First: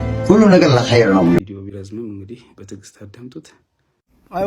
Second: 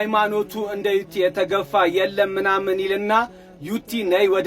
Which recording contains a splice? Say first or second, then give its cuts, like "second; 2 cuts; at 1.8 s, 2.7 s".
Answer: first; 1 cut; at 1.4 s